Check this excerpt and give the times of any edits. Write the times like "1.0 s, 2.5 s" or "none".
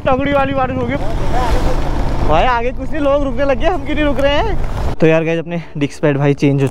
1.0 s, 4.9 s

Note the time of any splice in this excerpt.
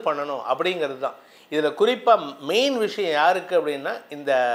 none

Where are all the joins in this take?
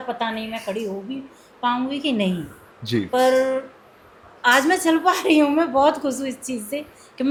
none

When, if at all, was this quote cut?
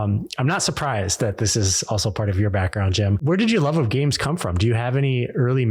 3.2 s

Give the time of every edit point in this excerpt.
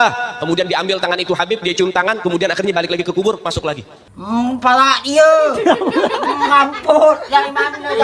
none

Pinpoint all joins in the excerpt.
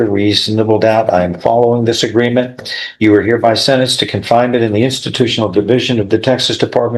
none

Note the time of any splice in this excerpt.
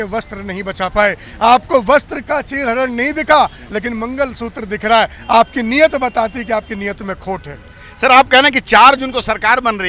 none

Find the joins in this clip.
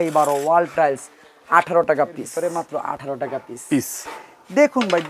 2.3 s

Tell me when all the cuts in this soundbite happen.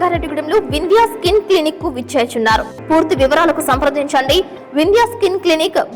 2.7 s

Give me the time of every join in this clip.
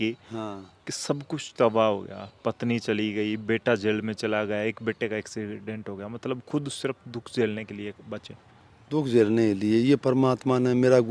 none

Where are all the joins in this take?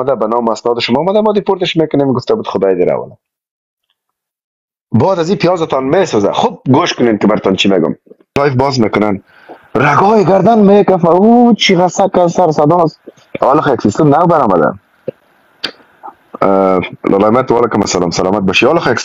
8.4 s

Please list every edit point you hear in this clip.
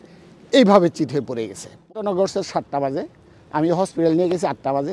1.9 s

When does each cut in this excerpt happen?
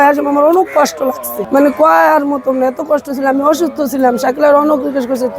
1.3 s

